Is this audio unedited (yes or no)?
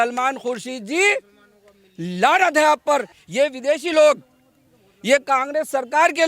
no